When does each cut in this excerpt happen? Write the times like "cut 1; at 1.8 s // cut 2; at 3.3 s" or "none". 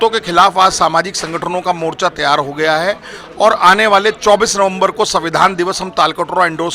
none